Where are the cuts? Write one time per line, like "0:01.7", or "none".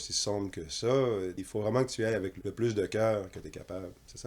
0:01.4
0:02.4